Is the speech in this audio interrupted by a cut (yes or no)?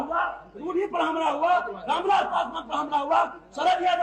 no